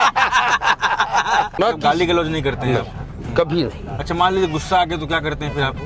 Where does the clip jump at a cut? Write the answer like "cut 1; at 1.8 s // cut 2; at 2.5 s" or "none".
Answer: cut 1; at 1.5 s